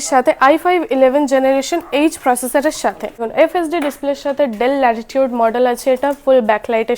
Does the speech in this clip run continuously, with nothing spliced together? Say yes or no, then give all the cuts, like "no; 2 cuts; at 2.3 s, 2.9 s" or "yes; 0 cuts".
no; 1 cut; at 3.3 s